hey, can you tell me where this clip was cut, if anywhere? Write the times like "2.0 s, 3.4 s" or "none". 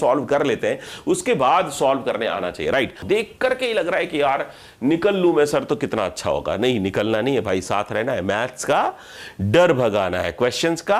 3.0 s